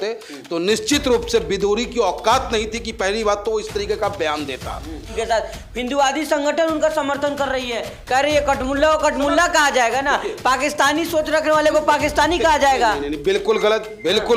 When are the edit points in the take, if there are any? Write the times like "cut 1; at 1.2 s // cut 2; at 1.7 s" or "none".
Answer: cut 1; at 5.1 s